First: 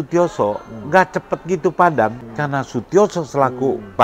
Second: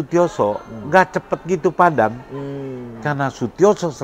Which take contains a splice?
first; 1 cut; at 2.2 s

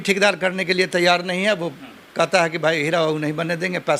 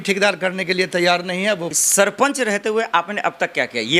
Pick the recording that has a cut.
second; 1 cut; at 1.8 s

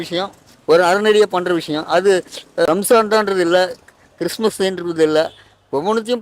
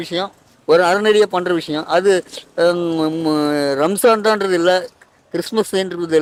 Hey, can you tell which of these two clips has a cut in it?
first; 1 cut; at 2.7 s

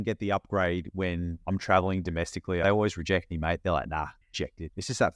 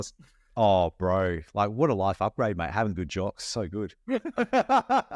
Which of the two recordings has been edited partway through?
first; 3 cuts; at 1.3 s, 2.6 s, 4.3 s

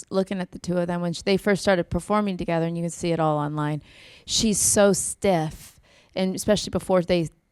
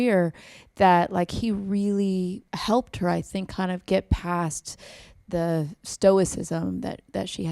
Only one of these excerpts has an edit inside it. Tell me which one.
second; 1 cut; at 2.5 s

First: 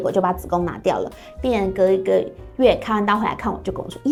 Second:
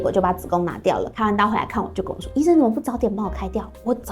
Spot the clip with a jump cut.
second; 1 cut; at 1.1 s

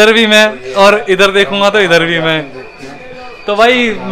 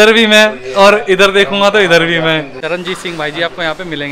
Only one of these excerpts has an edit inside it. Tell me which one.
second; 1 cut; at 2.5 s

